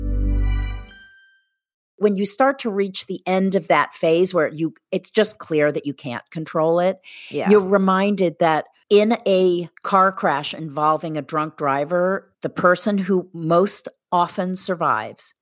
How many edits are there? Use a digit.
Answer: 4